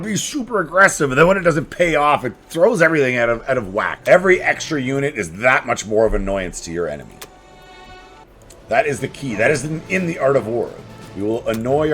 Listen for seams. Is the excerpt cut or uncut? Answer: cut